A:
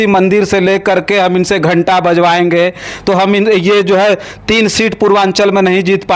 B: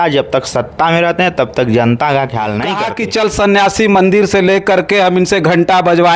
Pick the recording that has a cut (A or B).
B